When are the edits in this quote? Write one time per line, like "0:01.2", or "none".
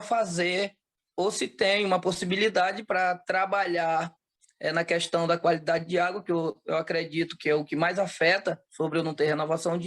0:01.0